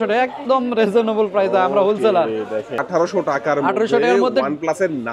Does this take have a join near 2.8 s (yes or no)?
yes